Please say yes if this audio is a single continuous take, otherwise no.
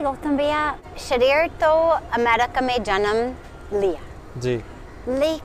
no